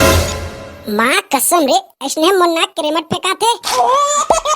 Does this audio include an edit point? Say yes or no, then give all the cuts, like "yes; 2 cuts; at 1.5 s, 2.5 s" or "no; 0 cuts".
yes; 1 cut; at 3.6 s